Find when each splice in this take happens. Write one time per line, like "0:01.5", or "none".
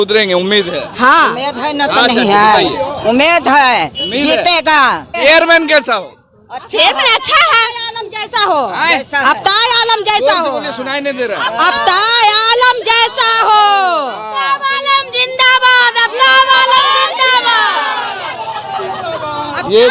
0:05.1